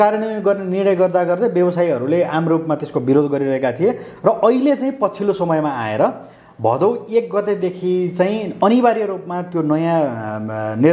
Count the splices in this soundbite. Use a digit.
0